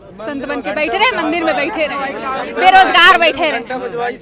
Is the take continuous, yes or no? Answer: yes